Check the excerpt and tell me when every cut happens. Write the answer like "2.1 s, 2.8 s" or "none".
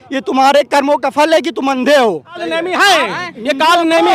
2.4 s